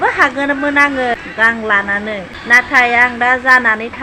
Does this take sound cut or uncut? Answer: cut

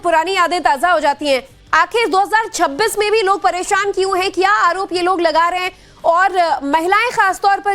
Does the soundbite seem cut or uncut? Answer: uncut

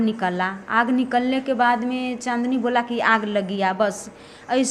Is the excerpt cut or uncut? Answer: uncut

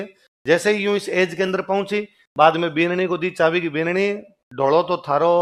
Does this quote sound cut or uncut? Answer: uncut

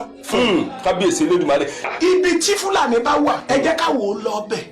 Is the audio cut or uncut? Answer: cut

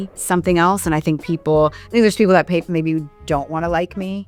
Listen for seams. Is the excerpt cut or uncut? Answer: uncut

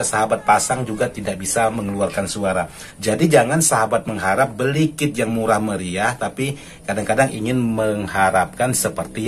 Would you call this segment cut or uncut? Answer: cut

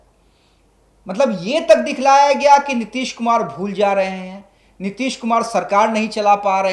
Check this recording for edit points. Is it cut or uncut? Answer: uncut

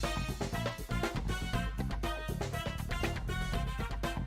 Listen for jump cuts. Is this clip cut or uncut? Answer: uncut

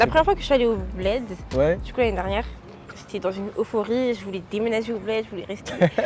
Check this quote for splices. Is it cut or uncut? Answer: uncut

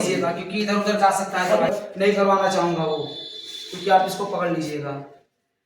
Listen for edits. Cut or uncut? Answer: cut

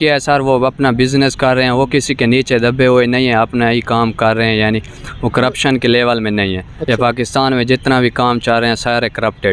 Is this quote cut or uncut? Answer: uncut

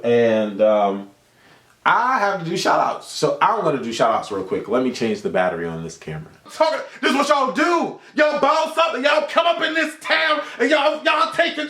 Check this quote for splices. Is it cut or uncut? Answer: cut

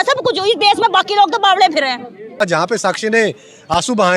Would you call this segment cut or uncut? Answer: cut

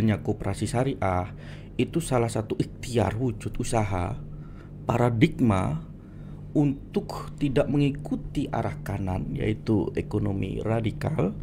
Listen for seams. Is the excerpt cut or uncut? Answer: uncut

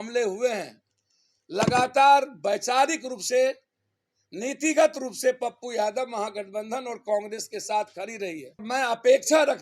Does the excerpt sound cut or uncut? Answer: cut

